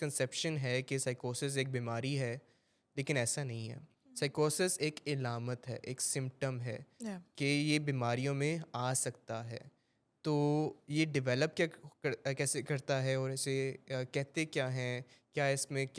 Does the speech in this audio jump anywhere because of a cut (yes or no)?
no